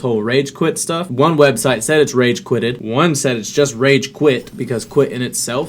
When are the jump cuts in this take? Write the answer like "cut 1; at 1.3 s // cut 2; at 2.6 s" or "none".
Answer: cut 1; at 1.1 s // cut 2; at 2.8 s // cut 3; at 4.5 s